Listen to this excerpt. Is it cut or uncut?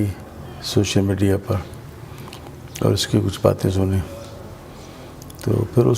uncut